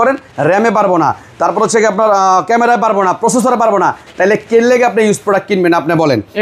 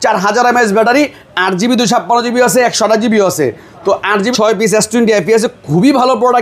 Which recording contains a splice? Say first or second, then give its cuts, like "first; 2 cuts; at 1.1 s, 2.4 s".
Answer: second; 1 cut; at 4.3 s